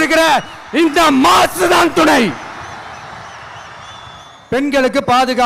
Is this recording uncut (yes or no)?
no